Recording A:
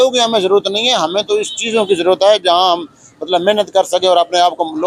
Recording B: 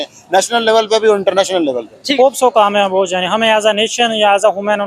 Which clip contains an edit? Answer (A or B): B